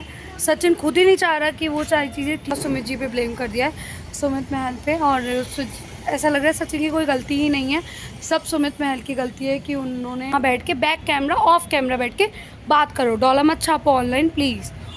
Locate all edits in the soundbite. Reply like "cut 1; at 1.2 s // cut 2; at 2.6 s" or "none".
cut 1; at 2.5 s // cut 2; at 10.3 s